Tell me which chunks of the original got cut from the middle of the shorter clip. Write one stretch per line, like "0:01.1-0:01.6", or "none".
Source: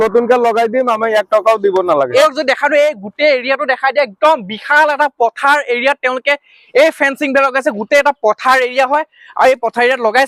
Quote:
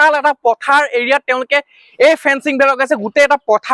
none